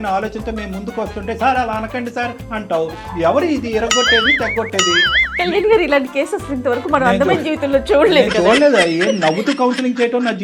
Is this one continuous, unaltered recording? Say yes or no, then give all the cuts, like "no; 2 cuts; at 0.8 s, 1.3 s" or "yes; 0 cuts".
yes; 0 cuts